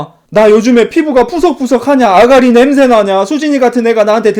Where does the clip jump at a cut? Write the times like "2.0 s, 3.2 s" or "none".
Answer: none